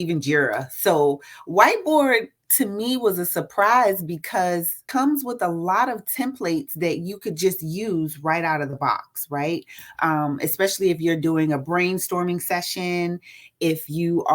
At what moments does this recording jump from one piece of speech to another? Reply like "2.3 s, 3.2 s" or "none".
4.8 s